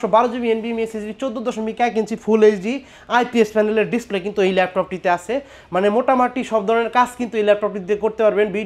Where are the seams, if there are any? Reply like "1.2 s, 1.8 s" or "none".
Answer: none